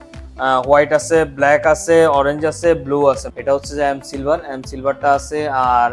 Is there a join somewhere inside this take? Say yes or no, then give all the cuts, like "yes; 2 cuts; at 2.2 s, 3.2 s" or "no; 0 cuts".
yes; 1 cut; at 3.3 s